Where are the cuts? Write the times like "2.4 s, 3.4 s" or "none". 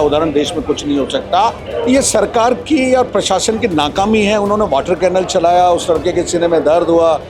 1.6 s